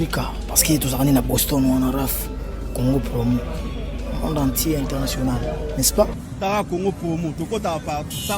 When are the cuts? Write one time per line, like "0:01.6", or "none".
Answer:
0:06.1